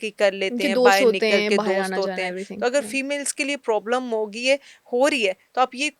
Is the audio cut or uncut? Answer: uncut